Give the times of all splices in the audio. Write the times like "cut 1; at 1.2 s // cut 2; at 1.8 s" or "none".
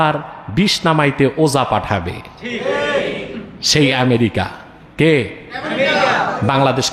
none